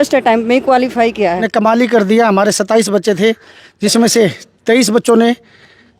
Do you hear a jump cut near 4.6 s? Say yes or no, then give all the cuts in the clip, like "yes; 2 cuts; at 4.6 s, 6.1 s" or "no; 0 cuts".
no; 1 cut; at 1.4 s